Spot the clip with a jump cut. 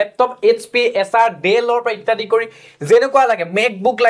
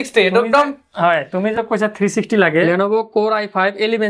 second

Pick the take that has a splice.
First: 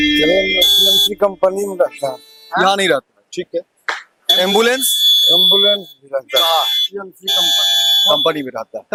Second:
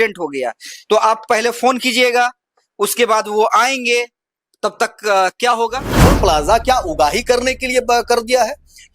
second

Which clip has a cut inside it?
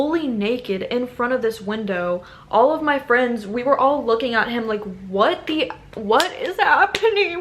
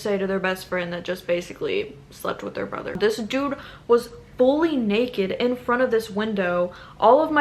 second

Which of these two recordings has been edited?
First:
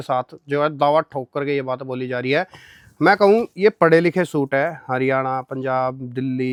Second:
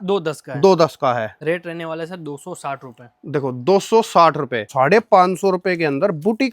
second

